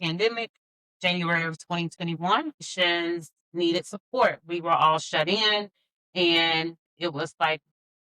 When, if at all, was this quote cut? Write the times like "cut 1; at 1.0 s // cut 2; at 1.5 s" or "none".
cut 1; at 2.6 s